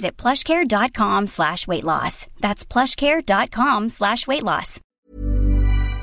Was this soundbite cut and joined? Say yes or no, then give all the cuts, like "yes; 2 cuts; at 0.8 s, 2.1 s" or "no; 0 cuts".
yes; 1 cut; at 4.8 s